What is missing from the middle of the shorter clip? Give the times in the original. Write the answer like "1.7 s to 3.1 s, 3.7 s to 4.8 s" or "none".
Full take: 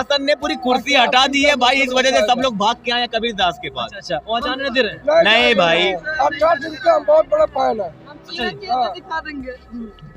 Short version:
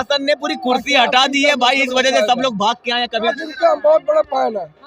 3.3 s to 6.6 s